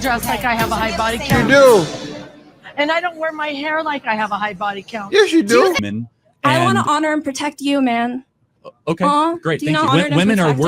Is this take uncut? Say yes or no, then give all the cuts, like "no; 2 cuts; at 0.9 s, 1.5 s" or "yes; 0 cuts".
no; 1 cut; at 5.8 s